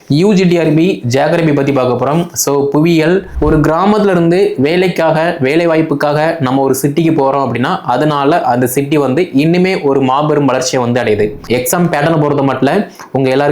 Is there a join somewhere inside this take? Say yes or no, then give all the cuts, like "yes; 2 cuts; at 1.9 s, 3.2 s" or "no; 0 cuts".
yes; 2 cuts; at 3.3 s, 11.4 s